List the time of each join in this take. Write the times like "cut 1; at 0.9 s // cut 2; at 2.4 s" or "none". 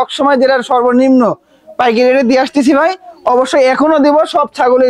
none